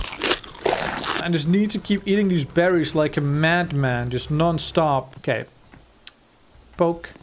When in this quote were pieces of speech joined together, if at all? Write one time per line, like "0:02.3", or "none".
0:01.1
0:05.1